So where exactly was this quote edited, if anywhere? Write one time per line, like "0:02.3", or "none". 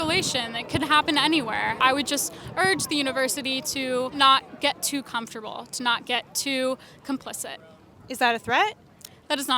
0:01.8
0:04.1